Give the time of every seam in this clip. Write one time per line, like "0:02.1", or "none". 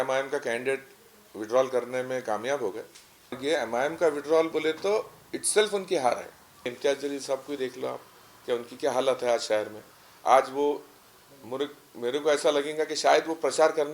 0:03.4
0:06.7